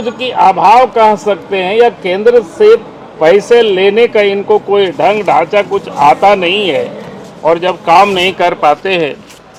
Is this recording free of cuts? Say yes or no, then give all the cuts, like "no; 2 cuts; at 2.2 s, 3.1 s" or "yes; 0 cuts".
yes; 0 cuts